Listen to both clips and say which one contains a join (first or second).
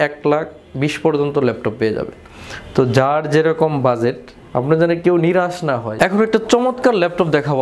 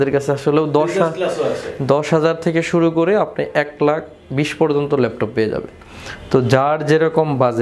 first